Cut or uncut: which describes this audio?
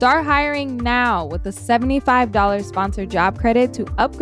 uncut